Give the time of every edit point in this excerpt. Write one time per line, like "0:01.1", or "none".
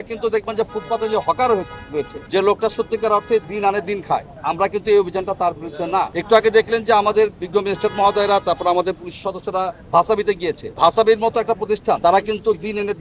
0:02.2
0:04.3
0:06.2
0:10.7
0:12.0

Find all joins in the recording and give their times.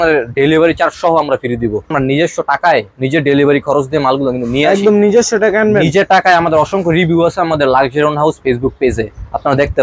0:01.9

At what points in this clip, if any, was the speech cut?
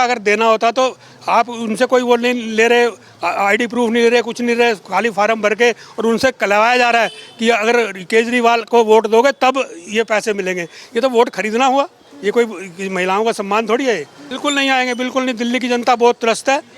0:14.3

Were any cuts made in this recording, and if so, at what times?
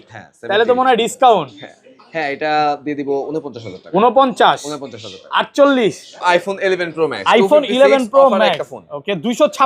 0:06.1

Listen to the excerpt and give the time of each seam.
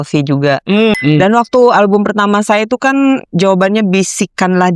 0:00.9

